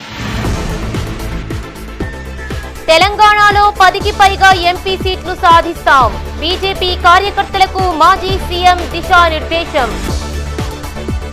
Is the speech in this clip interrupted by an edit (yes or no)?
yes